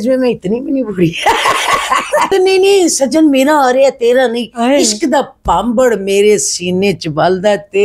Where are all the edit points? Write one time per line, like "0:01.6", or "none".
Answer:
0:02.3